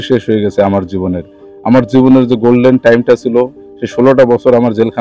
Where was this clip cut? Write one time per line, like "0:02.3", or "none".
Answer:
none